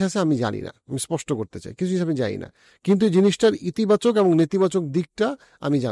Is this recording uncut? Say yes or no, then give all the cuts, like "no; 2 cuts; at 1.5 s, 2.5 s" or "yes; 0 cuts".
yes; 0 cuts